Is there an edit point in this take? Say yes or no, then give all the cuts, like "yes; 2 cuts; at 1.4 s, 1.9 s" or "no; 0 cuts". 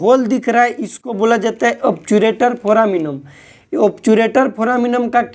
no; 0 cuts